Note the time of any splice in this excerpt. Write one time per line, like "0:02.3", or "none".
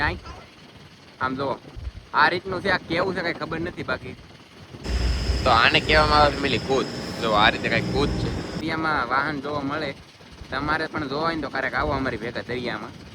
0:04.9
0:08.6